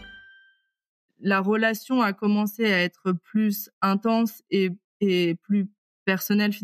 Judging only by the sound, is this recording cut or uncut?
cut